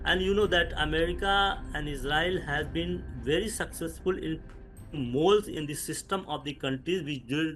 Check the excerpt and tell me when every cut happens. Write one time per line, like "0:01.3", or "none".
none